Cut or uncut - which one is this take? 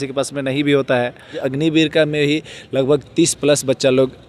cut